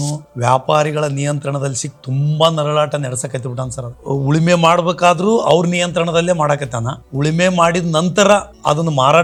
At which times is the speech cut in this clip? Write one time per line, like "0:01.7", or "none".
none

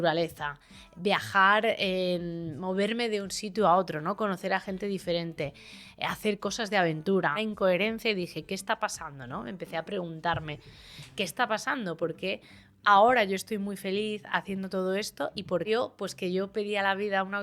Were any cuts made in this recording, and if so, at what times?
0:07.4
0:15.7

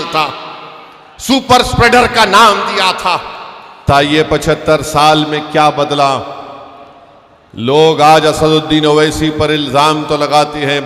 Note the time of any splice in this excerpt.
0:03.9

